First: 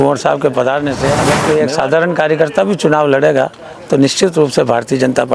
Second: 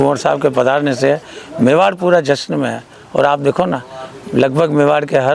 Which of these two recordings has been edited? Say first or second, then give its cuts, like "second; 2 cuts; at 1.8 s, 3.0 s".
first; 1 cut; at 1.3 s